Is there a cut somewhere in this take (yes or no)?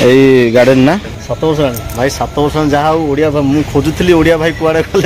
yes